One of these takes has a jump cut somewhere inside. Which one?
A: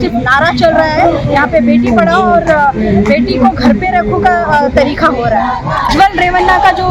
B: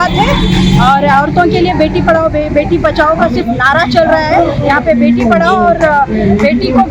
A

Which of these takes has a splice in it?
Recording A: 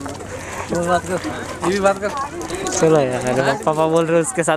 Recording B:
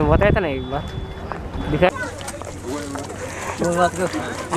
B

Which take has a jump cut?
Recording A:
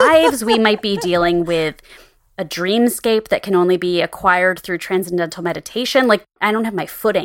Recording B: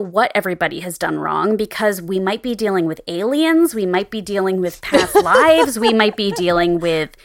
A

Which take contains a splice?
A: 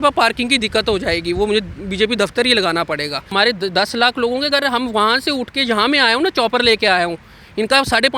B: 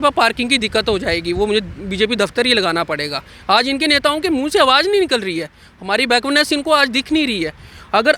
A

